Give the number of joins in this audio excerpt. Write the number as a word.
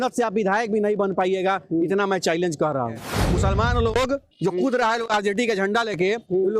one